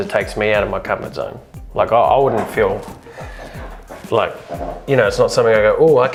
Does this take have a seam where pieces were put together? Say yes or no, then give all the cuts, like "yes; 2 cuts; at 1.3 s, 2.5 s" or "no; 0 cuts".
no; 0 cuts